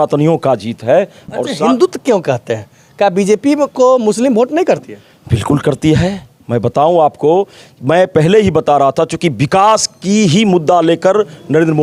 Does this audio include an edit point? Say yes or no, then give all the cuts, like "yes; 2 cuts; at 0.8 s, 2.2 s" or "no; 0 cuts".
no; 0 cuts